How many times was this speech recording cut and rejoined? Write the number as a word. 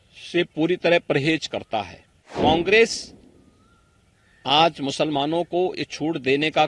one